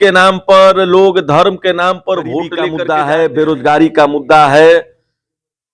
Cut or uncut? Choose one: cut